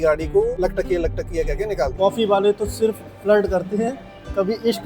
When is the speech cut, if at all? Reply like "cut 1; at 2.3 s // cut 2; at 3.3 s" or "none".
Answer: cut 1; at 1.9 s